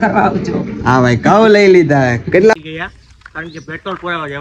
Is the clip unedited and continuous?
no; 1 cut; at 2.5 s

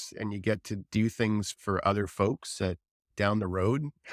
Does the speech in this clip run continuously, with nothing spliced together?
no; 2 cuts; at 1.5 s, 3.1 s

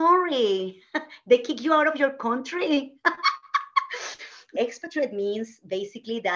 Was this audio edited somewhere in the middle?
yes; 1 cut; at 4.5 s

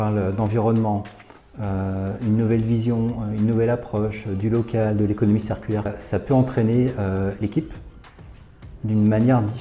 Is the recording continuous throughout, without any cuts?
no; 1 cut; at 5.9 s

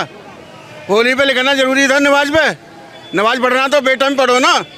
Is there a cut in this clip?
no; 0 cuts

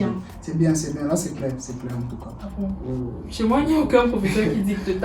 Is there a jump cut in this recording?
yes; 1 cut; at 2.2 s

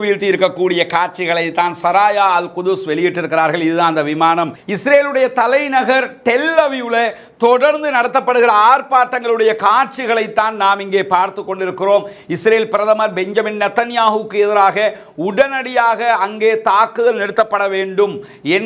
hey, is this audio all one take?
no; 1 cut; at 4.6 s

